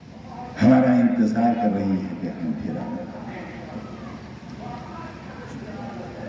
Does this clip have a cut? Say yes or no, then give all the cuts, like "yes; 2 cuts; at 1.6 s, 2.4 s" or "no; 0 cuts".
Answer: no; 0 cuts